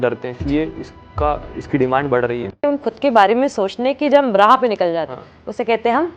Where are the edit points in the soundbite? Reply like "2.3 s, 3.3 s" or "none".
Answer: 2.6 s